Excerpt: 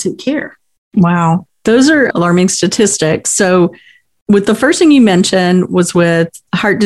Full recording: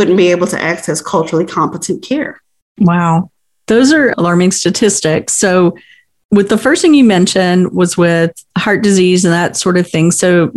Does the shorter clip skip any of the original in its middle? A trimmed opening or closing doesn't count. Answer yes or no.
yes